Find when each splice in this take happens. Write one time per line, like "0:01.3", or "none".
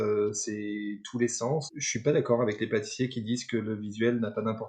0:01.7